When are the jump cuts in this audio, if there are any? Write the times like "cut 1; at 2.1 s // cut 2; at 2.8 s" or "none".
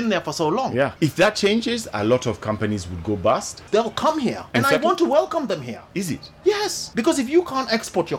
cut 1; at 0.9 s // cut 2; at 3.6 s // cut 3; at 4.4 s // cut 4; at 5.8 s // cut 5; at 6.8 s